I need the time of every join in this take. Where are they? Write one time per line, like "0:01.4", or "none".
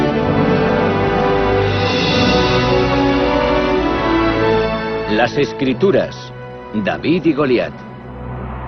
0:01.9